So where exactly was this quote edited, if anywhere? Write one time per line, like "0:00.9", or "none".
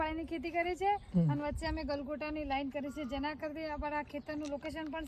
none